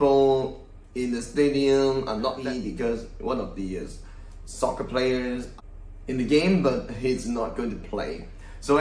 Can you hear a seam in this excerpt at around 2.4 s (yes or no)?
yes